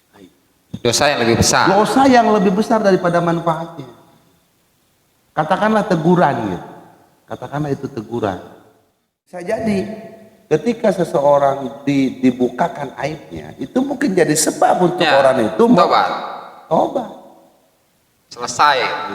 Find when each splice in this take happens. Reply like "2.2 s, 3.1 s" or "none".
9.4 s